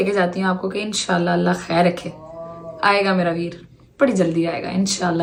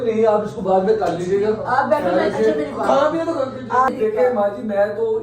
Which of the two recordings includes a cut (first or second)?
second